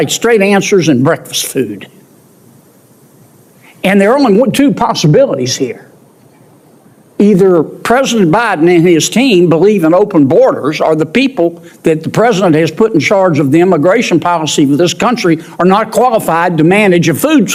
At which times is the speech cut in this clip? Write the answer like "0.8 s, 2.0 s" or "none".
none